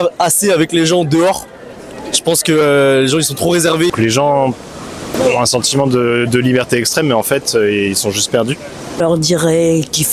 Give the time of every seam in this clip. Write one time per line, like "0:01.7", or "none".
0:03.9
0:09.0